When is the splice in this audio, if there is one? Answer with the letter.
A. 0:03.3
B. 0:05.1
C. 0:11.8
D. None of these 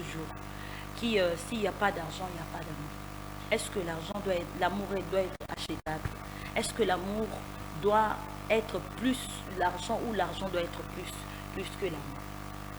D